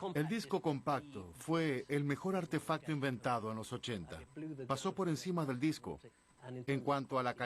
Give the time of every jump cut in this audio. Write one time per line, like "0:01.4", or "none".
0:06.3